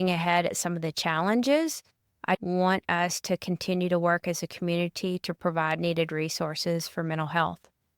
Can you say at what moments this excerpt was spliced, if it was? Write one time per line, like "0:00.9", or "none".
0:02.4